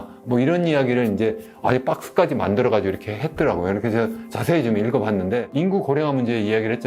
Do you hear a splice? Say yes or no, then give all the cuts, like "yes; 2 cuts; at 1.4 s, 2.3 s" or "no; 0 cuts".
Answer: yes; 1 cut; at 5.5 s